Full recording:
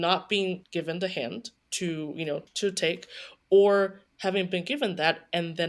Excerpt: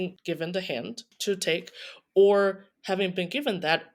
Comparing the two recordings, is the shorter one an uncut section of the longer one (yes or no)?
no